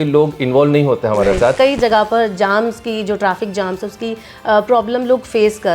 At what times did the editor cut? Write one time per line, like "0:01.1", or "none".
0:01.5